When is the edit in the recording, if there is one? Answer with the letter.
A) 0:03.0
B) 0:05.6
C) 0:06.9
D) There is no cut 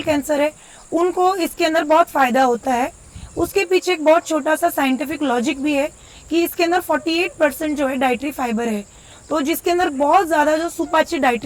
D